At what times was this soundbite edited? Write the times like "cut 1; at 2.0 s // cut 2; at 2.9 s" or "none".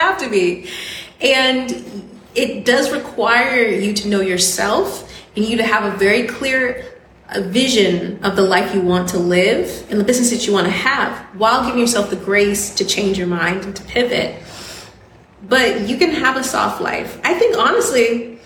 none